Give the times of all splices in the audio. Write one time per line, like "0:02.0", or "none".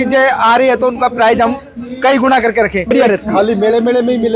0:02.9